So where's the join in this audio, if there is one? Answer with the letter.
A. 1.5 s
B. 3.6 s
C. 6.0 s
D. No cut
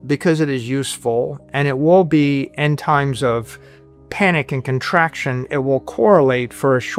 D